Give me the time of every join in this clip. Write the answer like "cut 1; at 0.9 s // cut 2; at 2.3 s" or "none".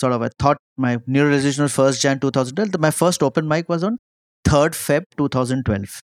none